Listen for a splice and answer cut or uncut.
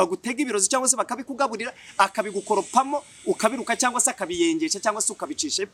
uncut